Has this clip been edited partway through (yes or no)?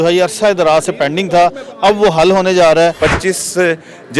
yes